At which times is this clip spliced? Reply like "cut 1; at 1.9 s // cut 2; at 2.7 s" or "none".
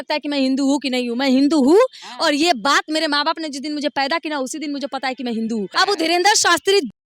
cut 1; at 5.7 s